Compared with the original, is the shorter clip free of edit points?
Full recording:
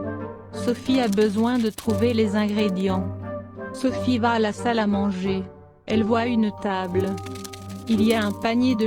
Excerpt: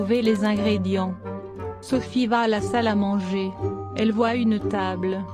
yes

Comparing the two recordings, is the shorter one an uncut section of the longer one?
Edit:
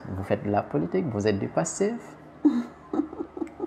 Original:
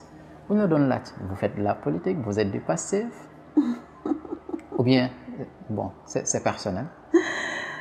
yes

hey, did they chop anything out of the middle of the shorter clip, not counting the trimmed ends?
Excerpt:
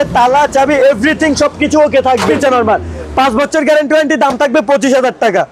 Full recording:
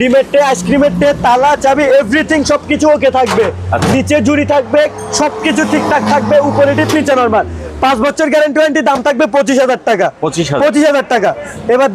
yes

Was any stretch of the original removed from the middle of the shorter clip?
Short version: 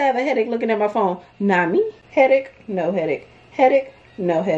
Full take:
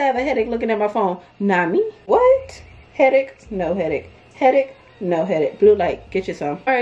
yes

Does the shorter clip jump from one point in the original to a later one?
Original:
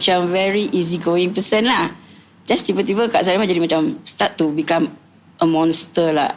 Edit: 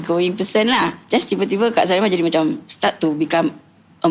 yes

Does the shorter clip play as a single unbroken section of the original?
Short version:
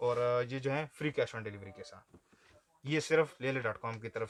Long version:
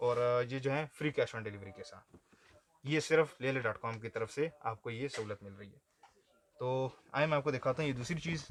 yes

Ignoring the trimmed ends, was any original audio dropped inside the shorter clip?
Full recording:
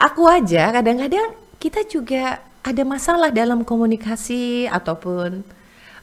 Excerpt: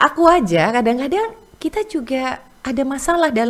no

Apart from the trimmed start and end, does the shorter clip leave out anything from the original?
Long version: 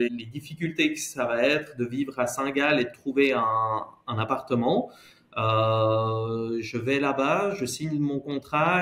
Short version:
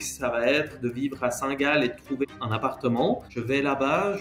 yes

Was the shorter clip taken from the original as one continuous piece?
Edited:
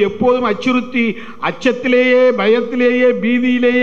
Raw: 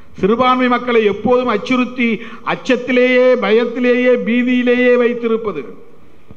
yes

